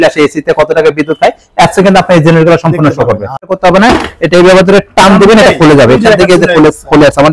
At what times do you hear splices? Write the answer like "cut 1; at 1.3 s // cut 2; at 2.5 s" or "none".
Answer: cut 1; at 3.4 s